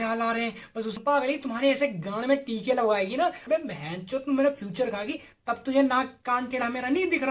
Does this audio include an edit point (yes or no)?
yes